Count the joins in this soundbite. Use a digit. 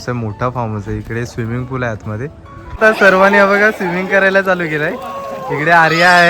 1